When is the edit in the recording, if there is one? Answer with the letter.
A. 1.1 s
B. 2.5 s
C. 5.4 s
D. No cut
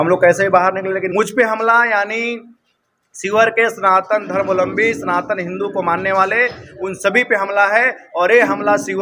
A